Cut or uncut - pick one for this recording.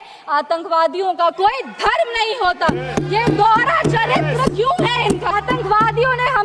cut